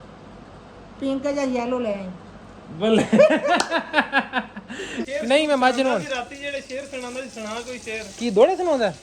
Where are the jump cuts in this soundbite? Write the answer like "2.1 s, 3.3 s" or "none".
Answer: 5.0 s